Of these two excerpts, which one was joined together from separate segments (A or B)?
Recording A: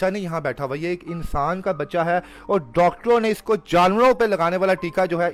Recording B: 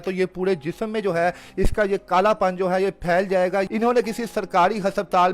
B